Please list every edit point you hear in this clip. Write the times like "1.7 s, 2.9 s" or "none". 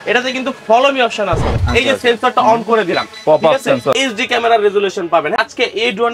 1.6 s, 3.9 s, 5.4 s